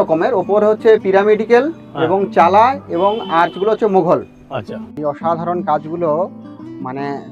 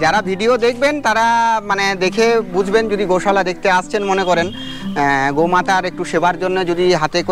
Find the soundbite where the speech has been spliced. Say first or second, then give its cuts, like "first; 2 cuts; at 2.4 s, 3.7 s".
first; 1 cut; at 4.9 s